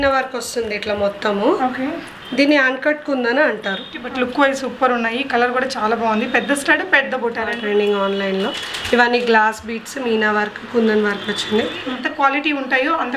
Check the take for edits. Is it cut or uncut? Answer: cut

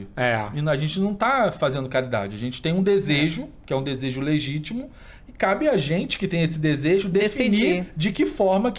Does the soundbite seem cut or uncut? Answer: uncut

